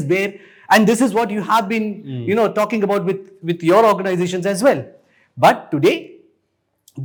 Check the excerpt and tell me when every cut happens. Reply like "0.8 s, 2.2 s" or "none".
none